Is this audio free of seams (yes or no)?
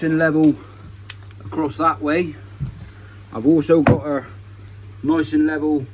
yes